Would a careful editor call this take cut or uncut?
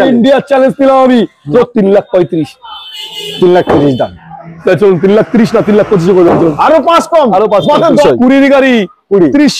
cut